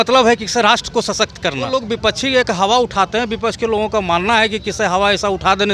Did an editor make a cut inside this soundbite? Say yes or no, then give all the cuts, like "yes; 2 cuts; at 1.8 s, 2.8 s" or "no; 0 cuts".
yes; 1 cut; at 2.1 s